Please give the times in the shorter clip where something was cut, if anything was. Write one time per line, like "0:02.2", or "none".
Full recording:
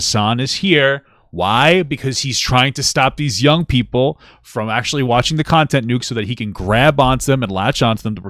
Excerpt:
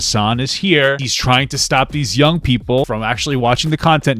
0:01.1
0:02.9